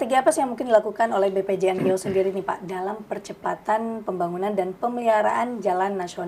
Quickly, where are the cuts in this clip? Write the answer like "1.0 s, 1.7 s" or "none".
none